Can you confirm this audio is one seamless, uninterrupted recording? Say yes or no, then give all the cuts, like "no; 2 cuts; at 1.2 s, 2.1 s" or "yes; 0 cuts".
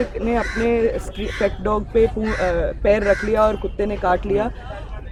yes; 0 cuts